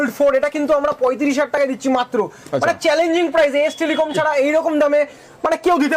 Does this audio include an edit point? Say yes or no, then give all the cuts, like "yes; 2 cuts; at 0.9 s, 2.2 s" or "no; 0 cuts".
no; 0 cuts